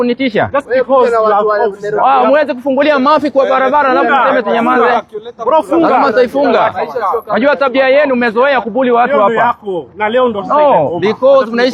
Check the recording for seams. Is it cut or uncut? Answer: uncut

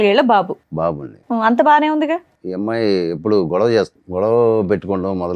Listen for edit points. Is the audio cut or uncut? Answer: cut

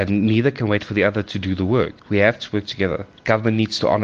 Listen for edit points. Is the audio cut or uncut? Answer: cut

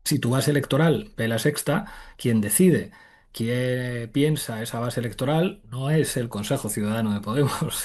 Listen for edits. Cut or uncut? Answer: uncut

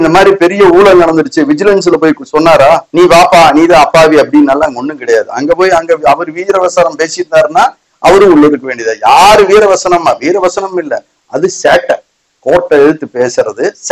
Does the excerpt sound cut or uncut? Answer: cut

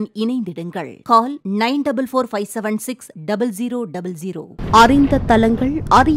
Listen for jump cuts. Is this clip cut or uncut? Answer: cut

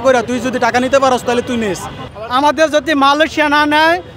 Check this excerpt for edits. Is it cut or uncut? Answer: cut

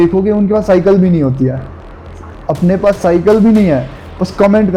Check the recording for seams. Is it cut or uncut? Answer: uncut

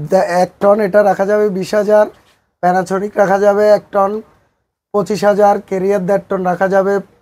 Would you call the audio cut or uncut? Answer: uncut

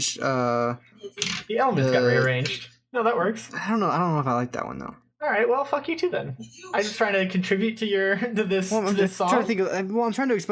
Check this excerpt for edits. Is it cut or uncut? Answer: uncut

